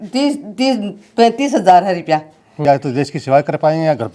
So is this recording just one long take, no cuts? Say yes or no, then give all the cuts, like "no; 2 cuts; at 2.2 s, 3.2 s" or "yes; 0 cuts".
no; 1 cut; at 2.6 s